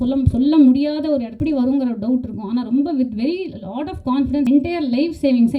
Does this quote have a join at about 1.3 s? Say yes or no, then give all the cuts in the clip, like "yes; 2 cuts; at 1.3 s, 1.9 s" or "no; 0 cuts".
yes; 2 cuts; at 1.3 s, 4.5 s